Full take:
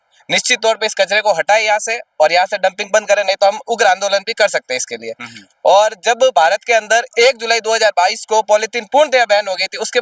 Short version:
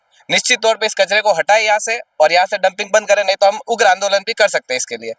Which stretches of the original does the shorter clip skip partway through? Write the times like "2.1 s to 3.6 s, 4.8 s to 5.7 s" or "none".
none